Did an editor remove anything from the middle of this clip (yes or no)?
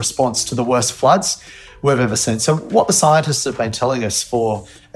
no